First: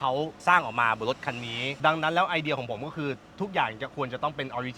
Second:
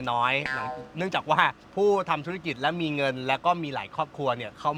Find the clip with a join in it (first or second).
first